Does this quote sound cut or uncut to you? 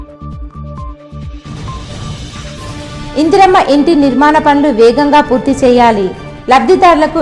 cut